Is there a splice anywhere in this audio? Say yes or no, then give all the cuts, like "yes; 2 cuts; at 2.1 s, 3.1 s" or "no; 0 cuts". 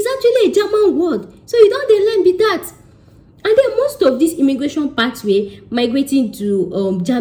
no; 0 cuts